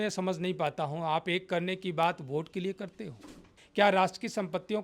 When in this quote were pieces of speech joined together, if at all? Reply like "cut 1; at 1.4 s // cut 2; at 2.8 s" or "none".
cut 1; at 3.6 s